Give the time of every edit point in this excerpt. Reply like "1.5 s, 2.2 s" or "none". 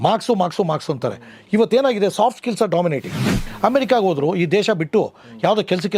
3.3 s